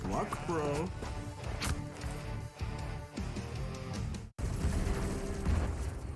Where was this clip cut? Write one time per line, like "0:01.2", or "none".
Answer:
0:04.3